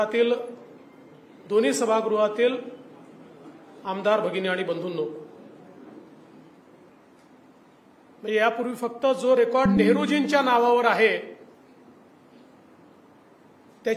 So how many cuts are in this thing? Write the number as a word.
one